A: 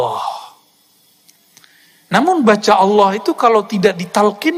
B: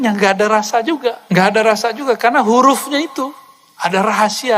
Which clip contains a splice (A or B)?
B